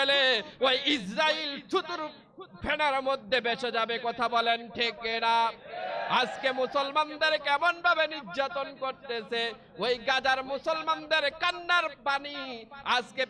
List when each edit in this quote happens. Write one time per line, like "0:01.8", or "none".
none